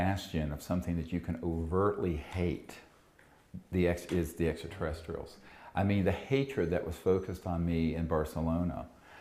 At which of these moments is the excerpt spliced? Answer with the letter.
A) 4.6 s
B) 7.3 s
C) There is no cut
B